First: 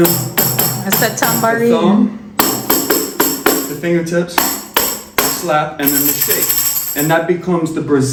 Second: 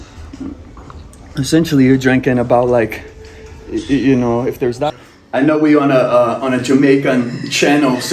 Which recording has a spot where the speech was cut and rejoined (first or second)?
second